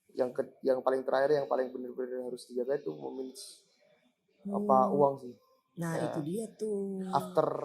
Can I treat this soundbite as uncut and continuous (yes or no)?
yes